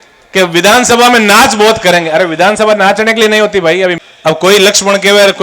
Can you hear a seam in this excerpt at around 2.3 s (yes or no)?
no